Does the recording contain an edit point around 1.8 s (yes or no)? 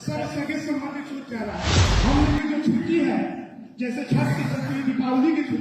yes